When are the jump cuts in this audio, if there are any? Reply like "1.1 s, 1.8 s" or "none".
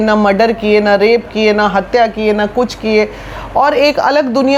none